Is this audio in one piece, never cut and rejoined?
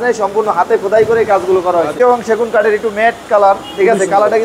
no; 1 cut; at 1.9 s

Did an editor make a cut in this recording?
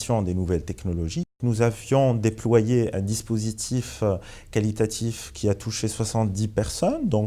yes; 1 cut; at 1.3 s

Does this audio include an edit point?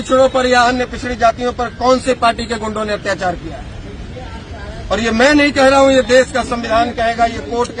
no; 0 cuts

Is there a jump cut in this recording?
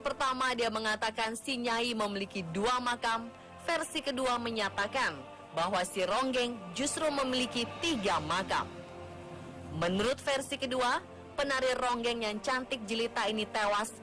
yes; 1 cut; at 10.7 s

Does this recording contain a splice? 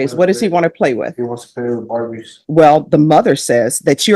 yes; 1 cut; at 2.3 s

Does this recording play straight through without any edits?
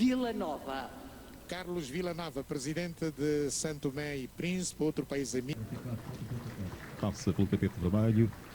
no; 1 cut; at 5.5 s

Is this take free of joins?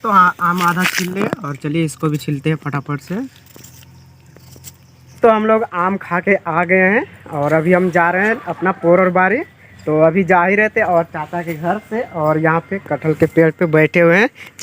no; 1 cut; at 5.1 s

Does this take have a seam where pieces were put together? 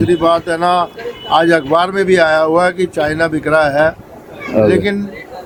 no; 0 cuts

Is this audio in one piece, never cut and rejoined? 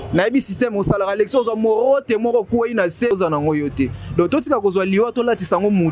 no; 1 cut; at 3.1 s

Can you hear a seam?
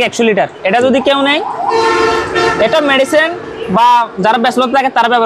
no; 0 cuts

